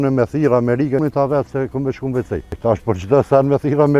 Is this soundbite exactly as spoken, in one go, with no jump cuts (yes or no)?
no